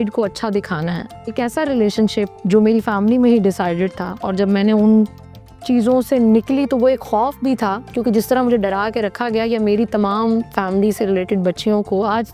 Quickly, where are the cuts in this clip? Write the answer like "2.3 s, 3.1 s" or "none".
1.3 s